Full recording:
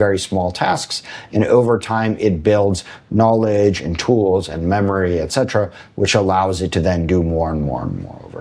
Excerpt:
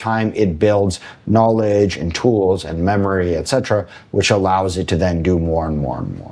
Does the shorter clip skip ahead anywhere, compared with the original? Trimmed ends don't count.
no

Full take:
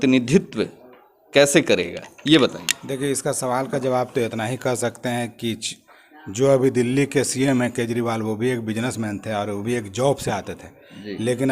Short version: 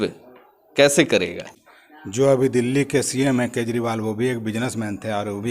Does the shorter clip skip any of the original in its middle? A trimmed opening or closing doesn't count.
yes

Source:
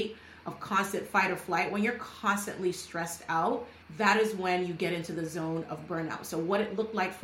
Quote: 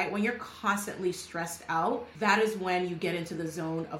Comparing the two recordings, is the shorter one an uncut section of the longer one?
no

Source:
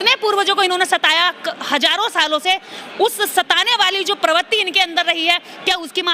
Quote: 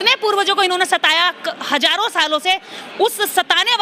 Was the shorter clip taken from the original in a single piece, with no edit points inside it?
yes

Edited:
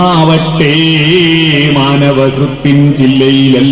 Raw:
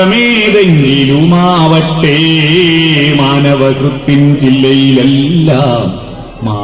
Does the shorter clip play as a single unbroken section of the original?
yes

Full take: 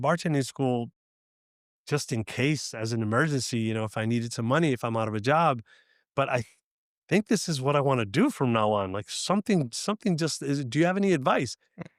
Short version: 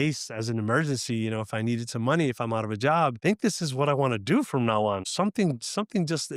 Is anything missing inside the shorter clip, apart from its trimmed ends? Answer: yes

